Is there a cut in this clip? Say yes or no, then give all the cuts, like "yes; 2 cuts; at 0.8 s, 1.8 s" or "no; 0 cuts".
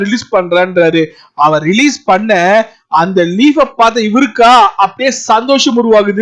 no; 0 cuts